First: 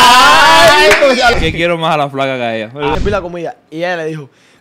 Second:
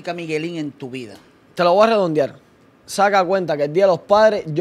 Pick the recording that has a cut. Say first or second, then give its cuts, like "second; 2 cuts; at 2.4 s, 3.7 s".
first; 2 cuts; at 1.3 s, 2.9 s